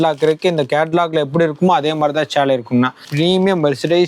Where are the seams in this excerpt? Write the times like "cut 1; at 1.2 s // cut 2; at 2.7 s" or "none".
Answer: cut 1; at 3.0 s